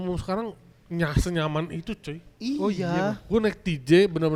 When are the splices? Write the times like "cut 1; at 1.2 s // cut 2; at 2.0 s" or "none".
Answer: none